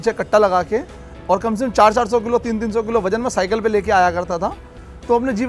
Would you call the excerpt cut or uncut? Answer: uncut